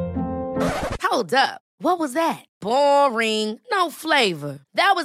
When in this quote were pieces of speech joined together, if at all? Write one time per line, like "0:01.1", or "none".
none